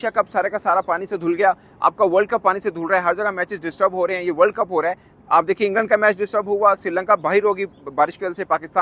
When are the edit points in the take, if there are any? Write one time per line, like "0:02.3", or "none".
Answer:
none